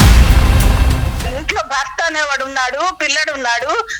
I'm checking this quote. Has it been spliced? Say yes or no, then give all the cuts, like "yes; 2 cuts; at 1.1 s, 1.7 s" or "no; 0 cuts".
yes; 1 cut; at 1.2 s